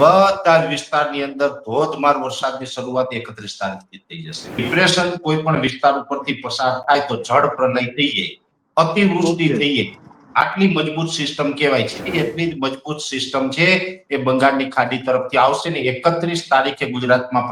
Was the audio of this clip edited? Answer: yes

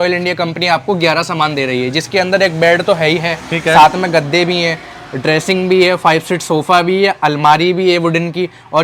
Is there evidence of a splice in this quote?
no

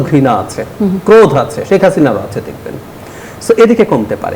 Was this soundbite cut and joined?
no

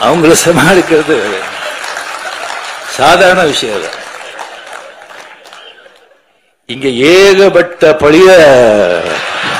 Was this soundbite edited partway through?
no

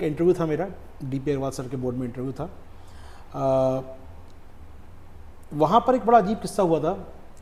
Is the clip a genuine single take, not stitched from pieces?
yes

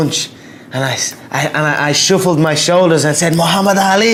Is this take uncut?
yes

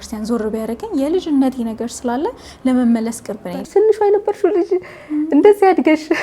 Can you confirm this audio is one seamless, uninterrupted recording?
no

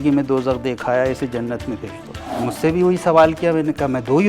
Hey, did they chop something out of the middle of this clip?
yes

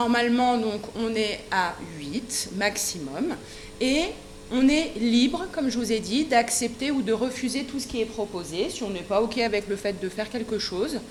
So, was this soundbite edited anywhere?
no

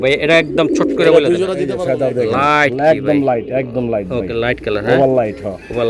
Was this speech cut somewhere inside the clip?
yes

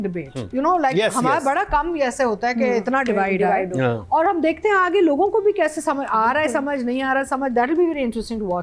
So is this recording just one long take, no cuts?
yes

